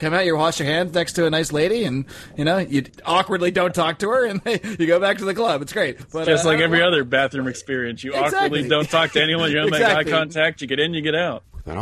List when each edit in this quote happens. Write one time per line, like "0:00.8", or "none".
0:02.9
0:06.0